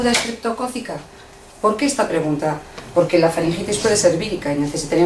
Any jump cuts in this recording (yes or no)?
no